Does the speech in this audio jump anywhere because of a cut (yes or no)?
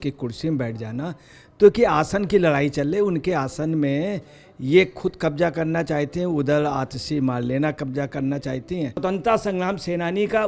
yes